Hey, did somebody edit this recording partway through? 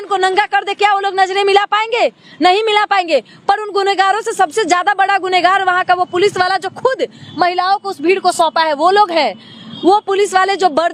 no; 0 cuts

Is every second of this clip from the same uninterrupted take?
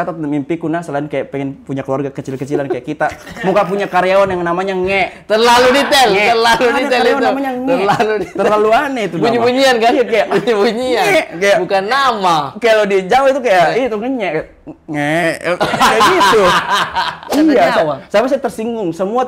no; 1 cut; at 17.2 s

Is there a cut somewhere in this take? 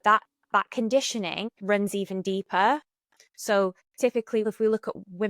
yes; 2 cuts; at 1.5 s, 4.4 s

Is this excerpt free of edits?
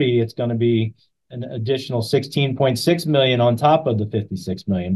yes; 0 cuts

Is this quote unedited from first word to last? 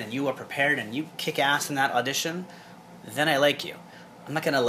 yes; 0 cuts

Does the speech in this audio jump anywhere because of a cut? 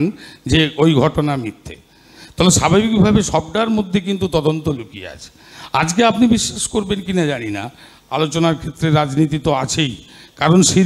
no; 0 cuts

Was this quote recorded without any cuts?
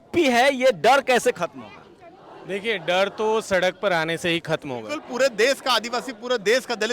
no; 1 cut; at 5.0 s

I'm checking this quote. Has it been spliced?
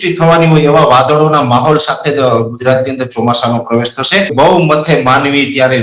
yes; 1 cut; at 4.3 s

